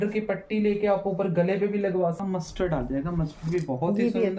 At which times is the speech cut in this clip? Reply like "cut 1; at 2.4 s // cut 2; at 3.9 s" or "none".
cut 1; at 2.2 s